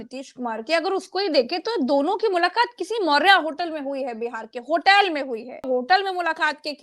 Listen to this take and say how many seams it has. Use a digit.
1